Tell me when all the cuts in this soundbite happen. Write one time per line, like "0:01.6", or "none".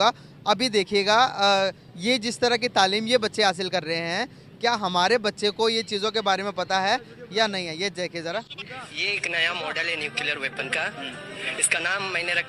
none